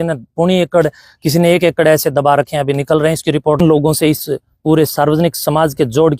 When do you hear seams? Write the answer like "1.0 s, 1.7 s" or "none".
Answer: 3.6 s